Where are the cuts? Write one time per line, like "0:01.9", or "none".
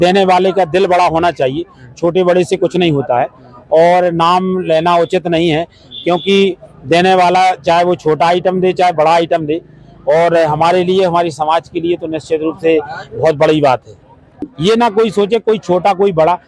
0:14.3

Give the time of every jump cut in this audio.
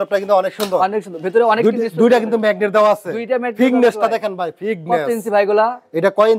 none

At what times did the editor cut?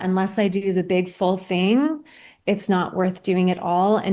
none

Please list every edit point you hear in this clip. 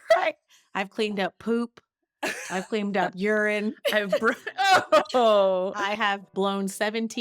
0:06.3

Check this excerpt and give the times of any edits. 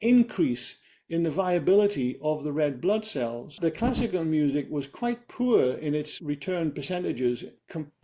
0:03.5

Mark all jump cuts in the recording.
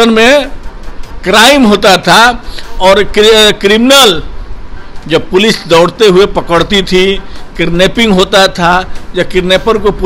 none

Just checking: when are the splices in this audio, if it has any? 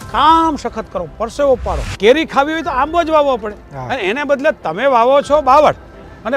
0:01.9

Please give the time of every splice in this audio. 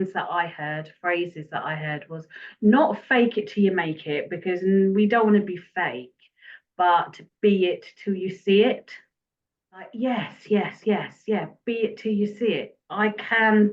0:09.9

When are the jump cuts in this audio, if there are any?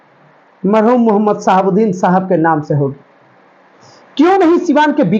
none

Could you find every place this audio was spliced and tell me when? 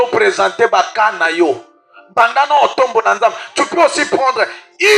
none

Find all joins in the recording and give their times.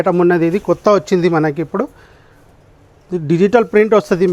none

